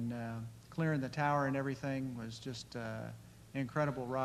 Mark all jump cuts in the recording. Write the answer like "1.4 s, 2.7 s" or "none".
none